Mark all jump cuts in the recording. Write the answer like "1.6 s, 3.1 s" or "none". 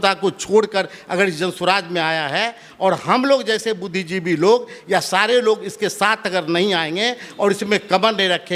none